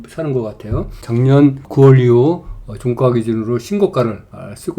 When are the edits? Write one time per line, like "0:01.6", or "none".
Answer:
0:01.0
0:01.6